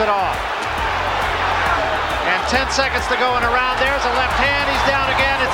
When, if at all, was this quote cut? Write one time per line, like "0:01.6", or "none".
none